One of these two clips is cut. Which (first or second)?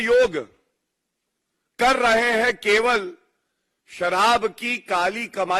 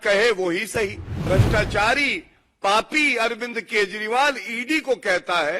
second